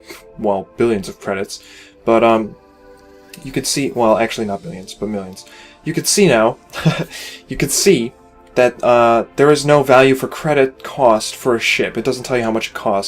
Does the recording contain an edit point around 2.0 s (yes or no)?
yes